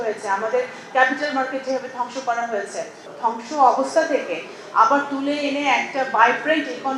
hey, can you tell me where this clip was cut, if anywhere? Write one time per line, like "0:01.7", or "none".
0:03.0